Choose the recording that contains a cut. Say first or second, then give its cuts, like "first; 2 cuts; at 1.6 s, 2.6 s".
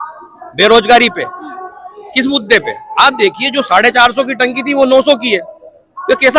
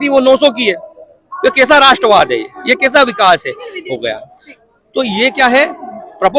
second; 1 cut; at 3.8 s